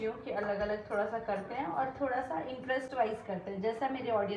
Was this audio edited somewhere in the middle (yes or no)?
no